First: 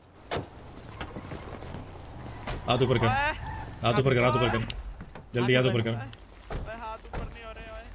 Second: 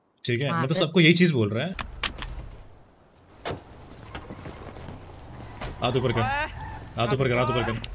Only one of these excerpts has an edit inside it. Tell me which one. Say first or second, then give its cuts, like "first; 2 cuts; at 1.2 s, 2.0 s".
second; 1 cut; at 1.9 s